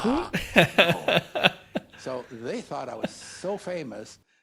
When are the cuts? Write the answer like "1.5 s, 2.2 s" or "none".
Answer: none